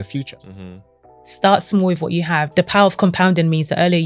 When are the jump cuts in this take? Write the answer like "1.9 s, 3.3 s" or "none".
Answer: 0.9 s, 2.5 s